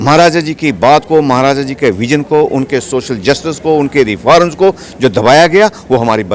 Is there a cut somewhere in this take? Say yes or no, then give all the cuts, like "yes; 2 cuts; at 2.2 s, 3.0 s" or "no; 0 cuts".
no; 0 cuts